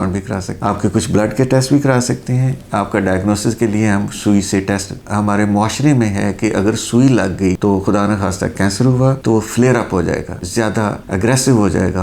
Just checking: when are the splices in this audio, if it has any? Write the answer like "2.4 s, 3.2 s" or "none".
5.0 s